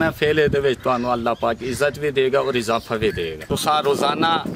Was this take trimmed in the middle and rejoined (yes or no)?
yes